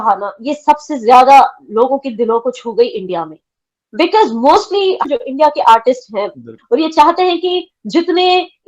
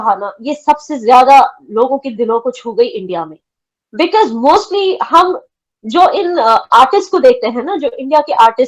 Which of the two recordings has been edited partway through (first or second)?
first